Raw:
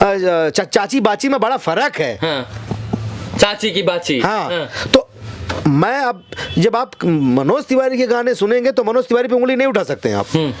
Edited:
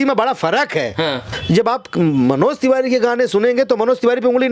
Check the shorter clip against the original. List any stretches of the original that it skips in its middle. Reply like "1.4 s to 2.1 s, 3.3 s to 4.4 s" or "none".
2.5 s to 6.4 s